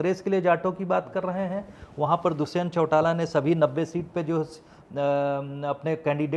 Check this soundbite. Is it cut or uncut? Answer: uncut